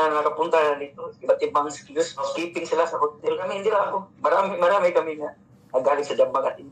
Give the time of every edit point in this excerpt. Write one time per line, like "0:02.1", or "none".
0:02.3
0:03.5